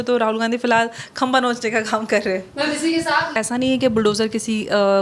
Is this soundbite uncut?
no; 1 cut; at 3.3 s

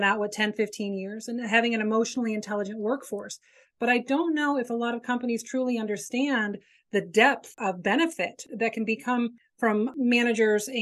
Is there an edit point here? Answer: yes; 2 cuts; at 7.5 s, 8.5 s

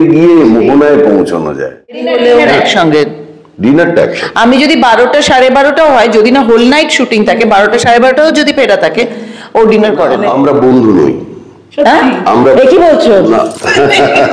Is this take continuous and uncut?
no; 2 cuts; at 2.1 s, 10.2 s

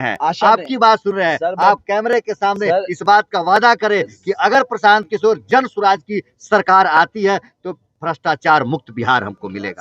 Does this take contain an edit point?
no; 0 cuts

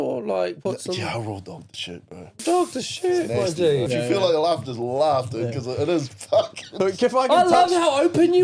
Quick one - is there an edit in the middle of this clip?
yes; 2 cuts; at 2.4 s, 3.9 s

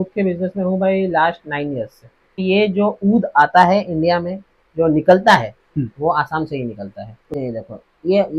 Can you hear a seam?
yes; 2 cuts; at 2.4 s, 7.2 s

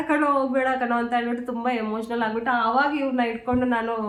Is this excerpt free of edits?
yes; 0 cuts

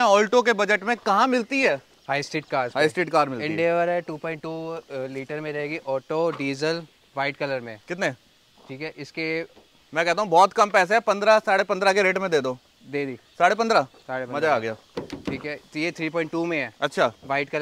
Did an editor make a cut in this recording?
no; 0 cuts

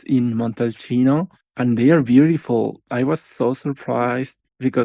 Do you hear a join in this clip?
yes; 1 cut; at 1.4 s

